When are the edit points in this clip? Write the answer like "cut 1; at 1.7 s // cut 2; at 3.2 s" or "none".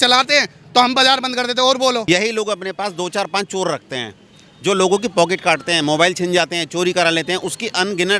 cut 1; at 2.0 s

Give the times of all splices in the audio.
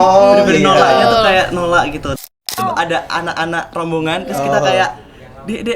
cut 1; at 2.5 s

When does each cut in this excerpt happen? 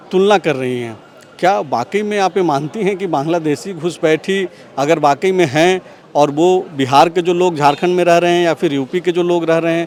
none

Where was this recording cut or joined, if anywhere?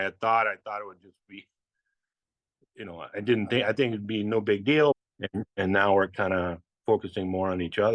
cut 1; at 4.9 s

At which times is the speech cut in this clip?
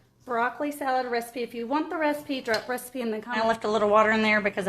cut 1; at 3.4 s

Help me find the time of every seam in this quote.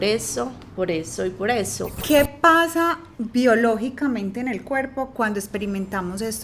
cut 1; at 1.9 s

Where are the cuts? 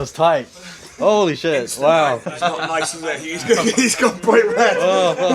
cut 1; at 2.3 s

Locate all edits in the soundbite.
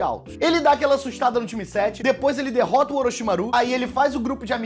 cut 1; at 2.2 s

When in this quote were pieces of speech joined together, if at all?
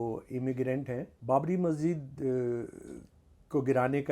cut 1; at 1.1 s

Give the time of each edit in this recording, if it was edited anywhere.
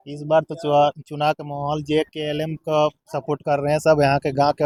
none

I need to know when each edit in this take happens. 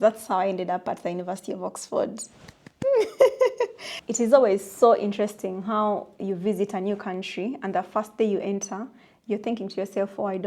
cut 1; at 3.9 s

